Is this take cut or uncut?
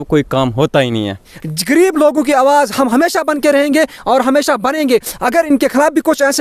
cut